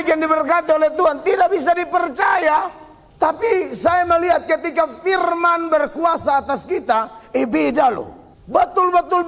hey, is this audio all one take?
yes; 0 cuts

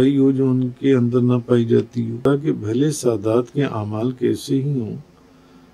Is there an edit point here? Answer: yes; 1 cut; at 2.2 s

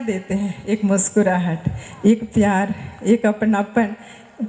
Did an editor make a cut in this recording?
no; 0 cuts

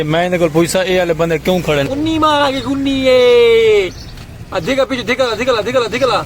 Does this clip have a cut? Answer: yes; 1 cut; at 1.9 s

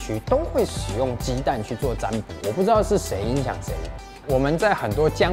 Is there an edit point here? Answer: no; 0 cuts

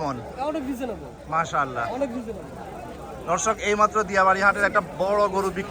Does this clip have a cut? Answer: no; 0 cuts

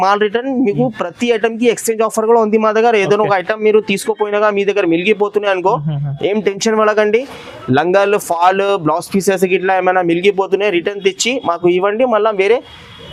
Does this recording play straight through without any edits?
yes; 0 cuts

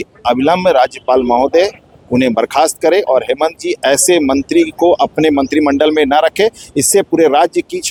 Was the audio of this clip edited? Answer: no; 0 cuts

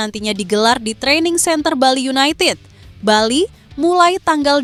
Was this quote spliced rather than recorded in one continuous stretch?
no; 0 cuts

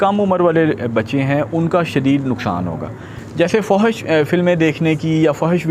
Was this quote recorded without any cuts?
no; 1 cut; at 3.3 s

